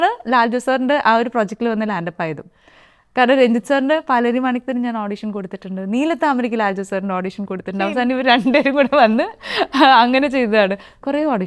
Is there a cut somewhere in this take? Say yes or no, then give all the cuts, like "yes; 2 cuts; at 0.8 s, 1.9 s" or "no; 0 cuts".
no; 0 cuts